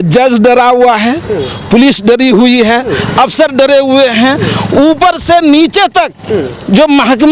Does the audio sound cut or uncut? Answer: uncut